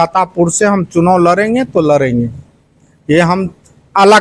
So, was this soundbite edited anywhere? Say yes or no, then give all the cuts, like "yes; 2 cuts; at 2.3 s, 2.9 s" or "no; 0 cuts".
no; 0 cuts